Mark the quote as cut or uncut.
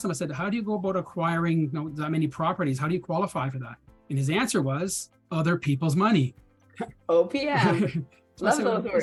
uncut